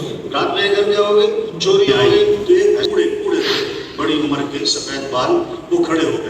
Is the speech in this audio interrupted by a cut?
yes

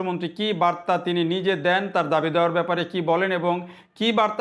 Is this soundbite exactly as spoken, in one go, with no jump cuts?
yes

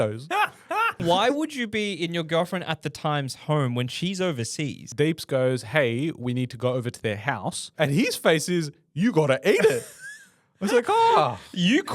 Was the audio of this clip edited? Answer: yes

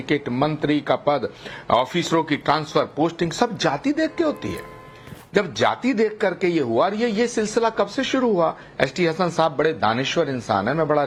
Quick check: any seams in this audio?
no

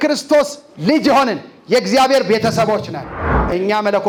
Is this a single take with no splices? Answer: yes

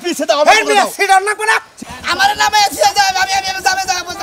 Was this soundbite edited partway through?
yes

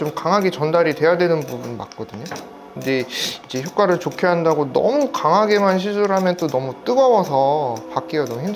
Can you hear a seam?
no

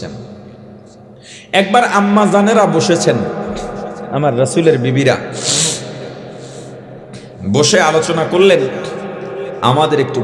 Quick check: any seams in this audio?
no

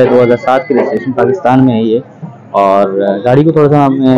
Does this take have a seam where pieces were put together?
no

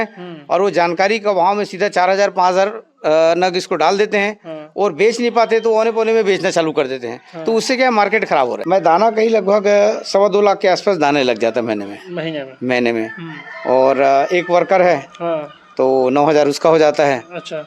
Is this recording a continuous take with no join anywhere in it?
no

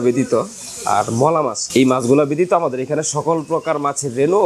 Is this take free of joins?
yes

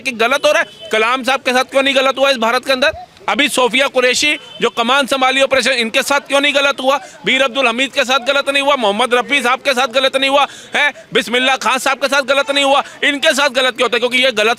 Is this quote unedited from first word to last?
yes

